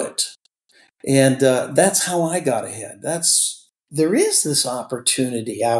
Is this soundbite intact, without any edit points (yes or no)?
no